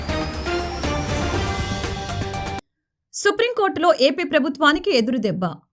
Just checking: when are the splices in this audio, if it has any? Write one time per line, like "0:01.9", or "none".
0:02.6

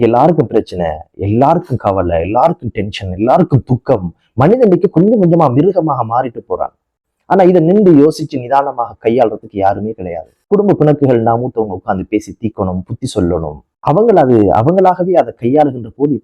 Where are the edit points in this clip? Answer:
none

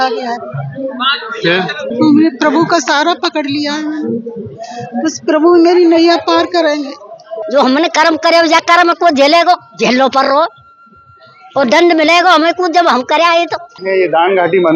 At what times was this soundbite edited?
0:01.9
0:07.3
0:13.7

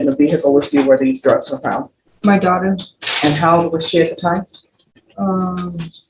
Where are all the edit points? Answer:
none

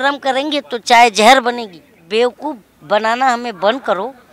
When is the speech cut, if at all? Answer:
0:02.0

